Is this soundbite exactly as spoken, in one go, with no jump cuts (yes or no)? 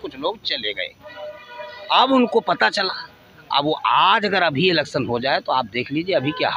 yes